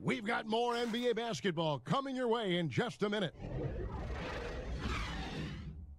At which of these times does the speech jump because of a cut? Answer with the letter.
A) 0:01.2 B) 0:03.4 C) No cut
B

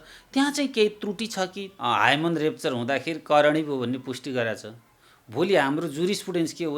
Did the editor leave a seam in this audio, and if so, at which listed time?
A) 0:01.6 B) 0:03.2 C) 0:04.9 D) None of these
A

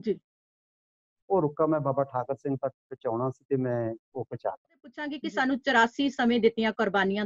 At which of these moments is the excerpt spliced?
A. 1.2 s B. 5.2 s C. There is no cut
B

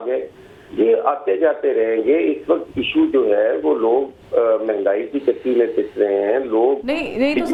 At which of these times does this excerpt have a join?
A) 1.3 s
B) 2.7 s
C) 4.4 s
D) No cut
D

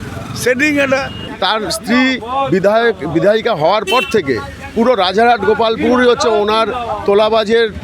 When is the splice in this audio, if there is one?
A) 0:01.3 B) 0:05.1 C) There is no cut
A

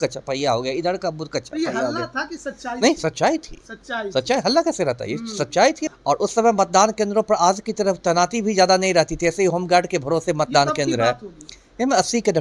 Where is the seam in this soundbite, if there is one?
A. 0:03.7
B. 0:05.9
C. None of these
B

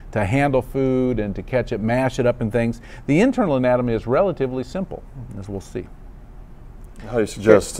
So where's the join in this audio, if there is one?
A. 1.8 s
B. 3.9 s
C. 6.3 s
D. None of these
A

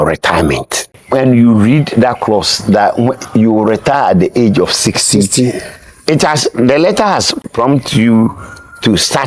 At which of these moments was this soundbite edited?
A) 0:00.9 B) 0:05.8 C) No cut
A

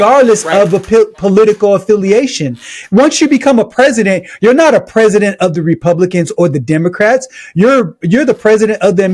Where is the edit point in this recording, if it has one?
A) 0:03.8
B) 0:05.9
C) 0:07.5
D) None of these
D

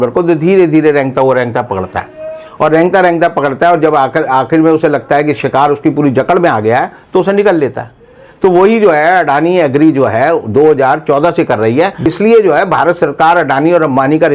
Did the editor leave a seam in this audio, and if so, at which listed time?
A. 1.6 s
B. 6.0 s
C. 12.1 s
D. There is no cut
C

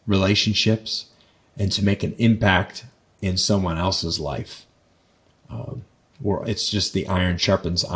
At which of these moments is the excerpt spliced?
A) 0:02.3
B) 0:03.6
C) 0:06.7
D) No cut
D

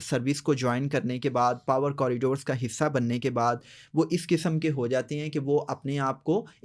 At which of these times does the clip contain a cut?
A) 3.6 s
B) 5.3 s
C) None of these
C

